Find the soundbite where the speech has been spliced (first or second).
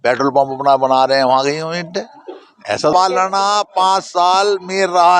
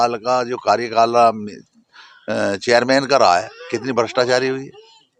first